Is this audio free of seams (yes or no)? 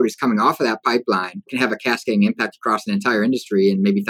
no